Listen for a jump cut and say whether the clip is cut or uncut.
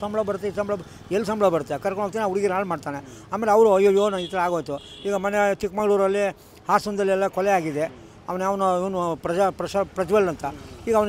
uncut